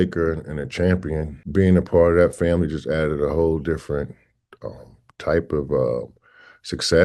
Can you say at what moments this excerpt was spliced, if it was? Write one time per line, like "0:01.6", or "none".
0:01.3